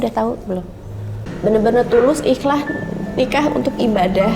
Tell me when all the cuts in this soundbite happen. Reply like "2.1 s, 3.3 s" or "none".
1.2 s